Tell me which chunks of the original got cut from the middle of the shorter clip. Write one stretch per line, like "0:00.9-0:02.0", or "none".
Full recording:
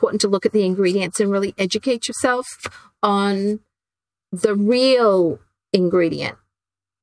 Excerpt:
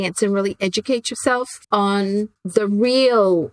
0:02.5-0:02.9
0:03.7-0:04.3